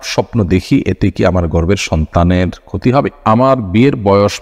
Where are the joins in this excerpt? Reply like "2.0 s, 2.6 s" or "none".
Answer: 3.1 s